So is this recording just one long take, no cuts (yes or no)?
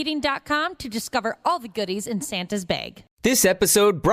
yes